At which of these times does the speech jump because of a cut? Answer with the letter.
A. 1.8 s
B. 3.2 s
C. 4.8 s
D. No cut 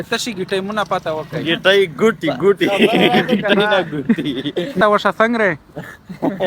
C